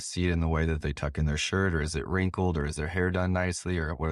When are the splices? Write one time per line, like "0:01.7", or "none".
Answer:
none

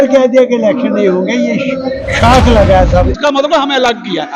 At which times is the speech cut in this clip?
0:03.1

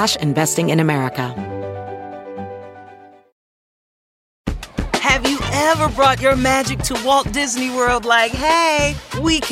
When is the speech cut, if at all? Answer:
0:01.3

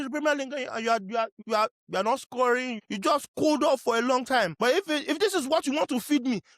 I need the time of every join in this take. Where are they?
0:01.4
0:02.7
0:04.5

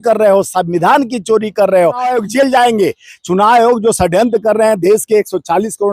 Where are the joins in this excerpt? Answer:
0:02.1

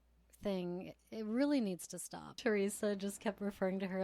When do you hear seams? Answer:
0:02.4

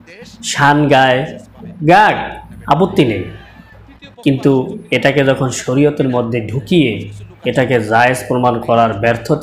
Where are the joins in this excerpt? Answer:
none

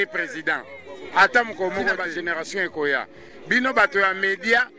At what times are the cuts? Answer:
0:02.1

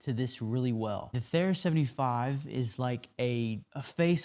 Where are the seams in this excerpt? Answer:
0:01.1

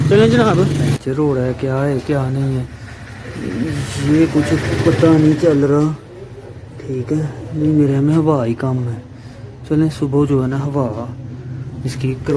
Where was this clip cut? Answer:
0:00.9

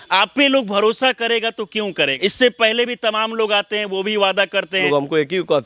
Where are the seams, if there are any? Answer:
0:02.1
0:04.8

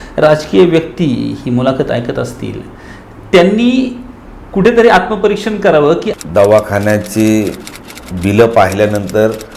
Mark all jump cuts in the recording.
0:06.1

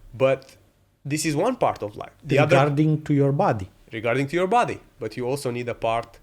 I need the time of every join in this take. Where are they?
0:02.1

